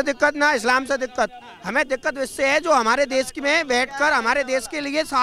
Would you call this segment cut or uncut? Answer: uncut